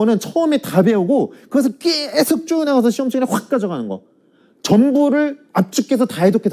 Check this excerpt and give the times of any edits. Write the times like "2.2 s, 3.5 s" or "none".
none